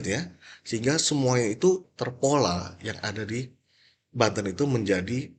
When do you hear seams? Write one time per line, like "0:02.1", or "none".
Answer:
0:01.9